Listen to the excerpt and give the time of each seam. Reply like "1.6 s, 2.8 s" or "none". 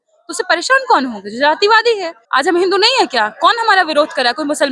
2.1 s